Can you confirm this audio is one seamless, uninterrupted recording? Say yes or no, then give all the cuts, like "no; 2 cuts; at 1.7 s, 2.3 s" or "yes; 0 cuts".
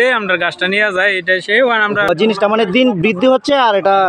no; 1 cut; at 2.1 s